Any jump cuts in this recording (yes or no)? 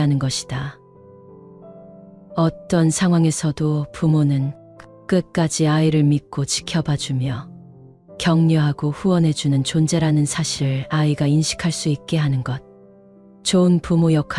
no